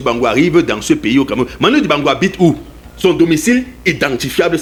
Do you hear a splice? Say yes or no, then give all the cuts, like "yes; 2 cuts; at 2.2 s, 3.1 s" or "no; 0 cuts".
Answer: no; 0 cuts